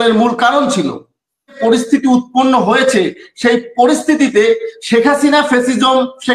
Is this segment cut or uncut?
cut